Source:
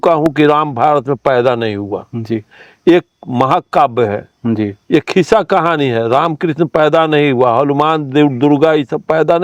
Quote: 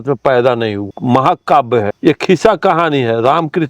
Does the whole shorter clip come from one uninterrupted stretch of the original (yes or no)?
no